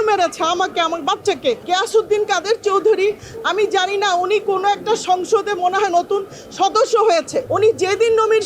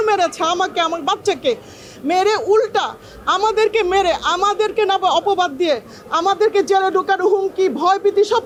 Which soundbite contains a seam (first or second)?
first